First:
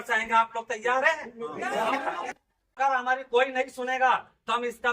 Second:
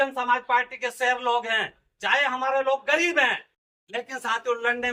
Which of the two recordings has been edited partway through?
first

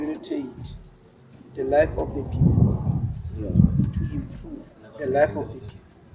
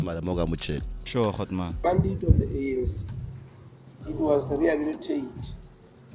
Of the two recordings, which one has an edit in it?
second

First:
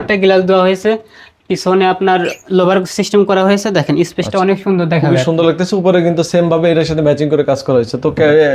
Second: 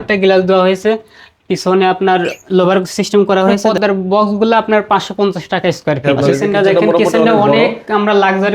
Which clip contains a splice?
second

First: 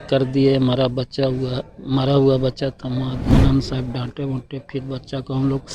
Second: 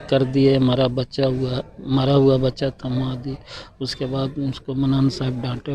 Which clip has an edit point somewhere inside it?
first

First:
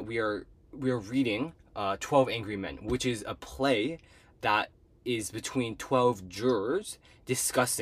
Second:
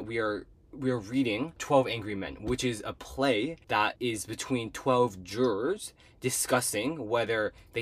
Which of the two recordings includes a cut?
second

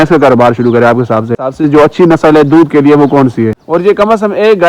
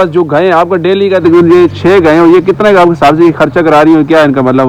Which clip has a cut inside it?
first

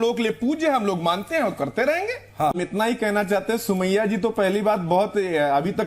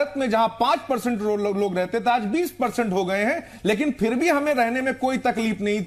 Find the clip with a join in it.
first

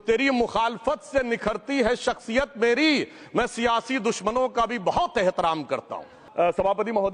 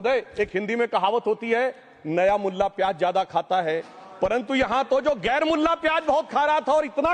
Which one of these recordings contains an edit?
first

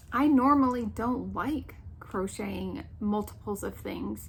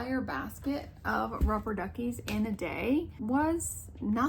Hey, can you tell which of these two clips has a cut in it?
second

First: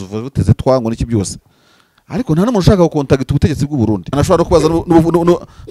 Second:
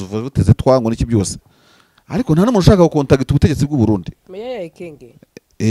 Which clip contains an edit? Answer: first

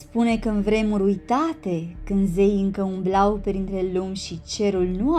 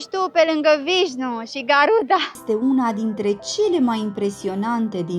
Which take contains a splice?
second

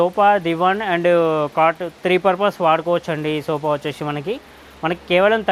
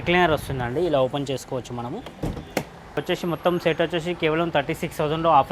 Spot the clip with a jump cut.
second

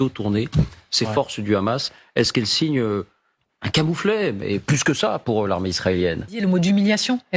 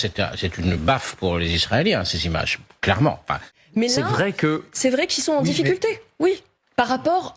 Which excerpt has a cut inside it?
second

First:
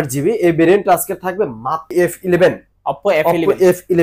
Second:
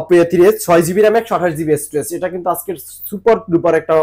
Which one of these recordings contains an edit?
first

